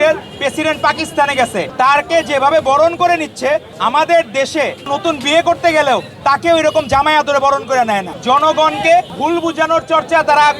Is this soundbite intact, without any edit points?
no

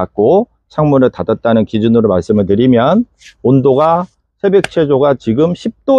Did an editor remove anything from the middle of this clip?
no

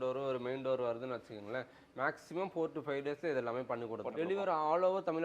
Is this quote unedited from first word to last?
no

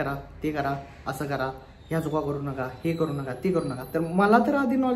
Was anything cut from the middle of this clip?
no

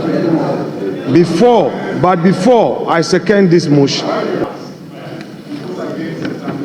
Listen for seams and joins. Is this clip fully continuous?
no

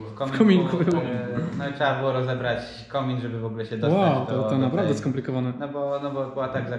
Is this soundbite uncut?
yes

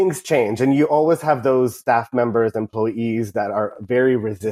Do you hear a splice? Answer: yes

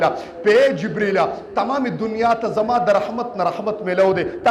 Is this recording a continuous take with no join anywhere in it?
yes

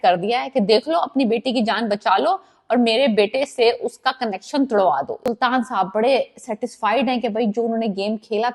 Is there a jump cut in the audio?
yes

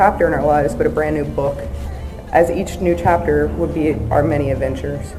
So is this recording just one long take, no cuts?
yes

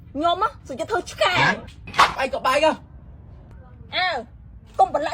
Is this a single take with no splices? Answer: no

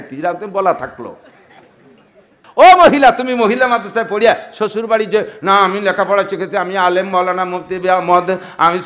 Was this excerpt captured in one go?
no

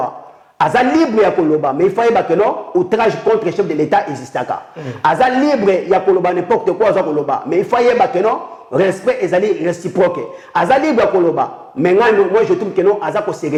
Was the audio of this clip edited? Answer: no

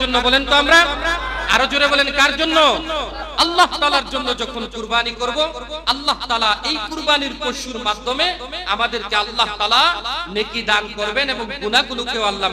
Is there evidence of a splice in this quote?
no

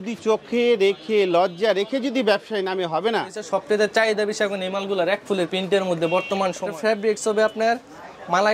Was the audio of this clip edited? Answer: yes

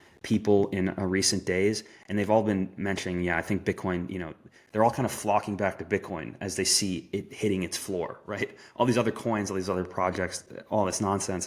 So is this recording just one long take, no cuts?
yes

